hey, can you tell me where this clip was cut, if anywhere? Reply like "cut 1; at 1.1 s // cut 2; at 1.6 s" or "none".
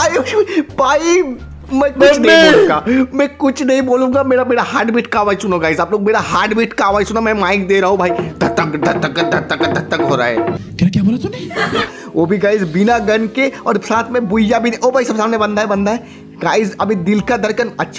cut 1; at 11.9 s

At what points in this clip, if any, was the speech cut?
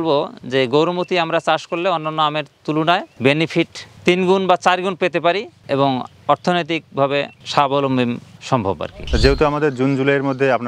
cut 1; at 8.9 s

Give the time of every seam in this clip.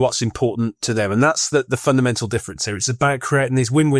none

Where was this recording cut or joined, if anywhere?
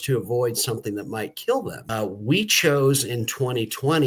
cut 1; at 1.8 s

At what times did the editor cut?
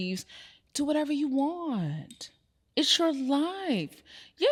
none

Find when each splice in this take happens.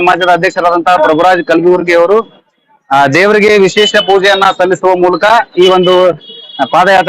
none

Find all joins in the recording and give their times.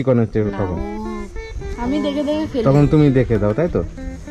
none

